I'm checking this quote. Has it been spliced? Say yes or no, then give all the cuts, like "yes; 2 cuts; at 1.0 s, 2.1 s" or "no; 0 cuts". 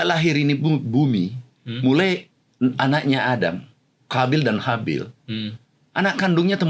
no; 0 cuts